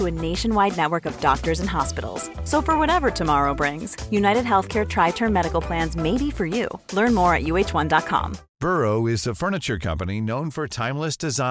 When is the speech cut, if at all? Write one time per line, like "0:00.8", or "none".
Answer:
0:08.4